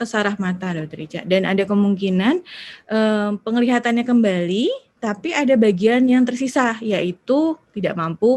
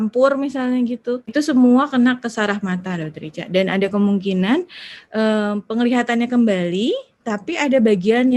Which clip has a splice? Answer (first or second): second